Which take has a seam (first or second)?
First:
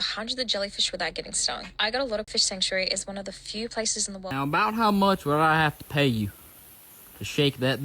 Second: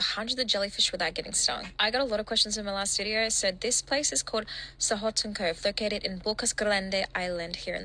first